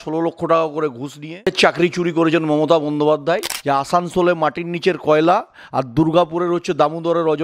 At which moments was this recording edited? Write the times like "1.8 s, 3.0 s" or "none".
1.5 s, 3.5 s

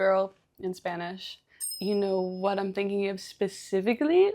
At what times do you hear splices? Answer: 1.7 s

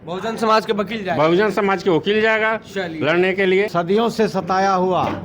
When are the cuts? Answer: 3.7 s

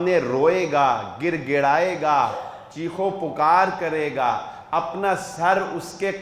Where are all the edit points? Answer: none

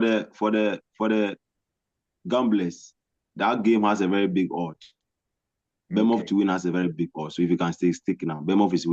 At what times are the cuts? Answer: none

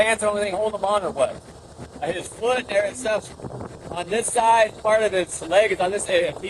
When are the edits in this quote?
1.5 s

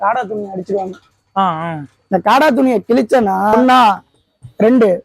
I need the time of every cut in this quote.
3.6 s

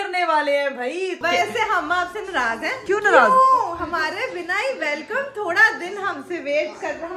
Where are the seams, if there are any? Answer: 1.2 s, 2.8 s

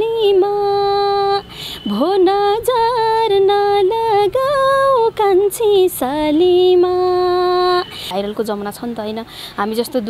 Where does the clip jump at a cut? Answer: 8.1 s

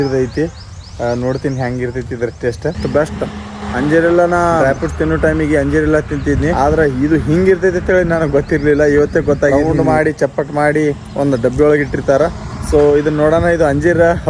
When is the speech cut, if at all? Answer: 2.8 s, 3.6 s, 4.6 s, 6.5 s, 9.5 s

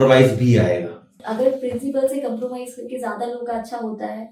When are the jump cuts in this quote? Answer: 1.2 s

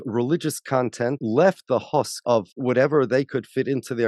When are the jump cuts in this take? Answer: 1.2 s, 2.4 s

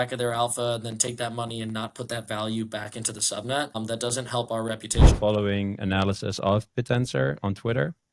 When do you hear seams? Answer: 3.8 s, 5.1 s

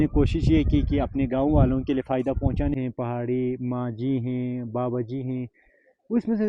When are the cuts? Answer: 2.8 s

